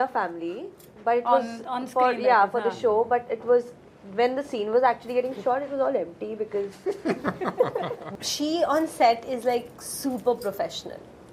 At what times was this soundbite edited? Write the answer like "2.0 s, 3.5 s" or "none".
8.0 s